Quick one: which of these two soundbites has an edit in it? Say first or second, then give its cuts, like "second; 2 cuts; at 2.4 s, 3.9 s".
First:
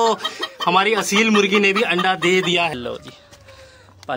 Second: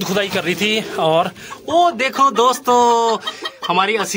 first; 1 cut; at 2.7 s